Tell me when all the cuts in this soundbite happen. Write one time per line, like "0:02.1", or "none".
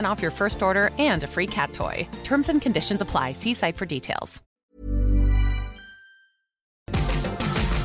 0:04.5
0:06.9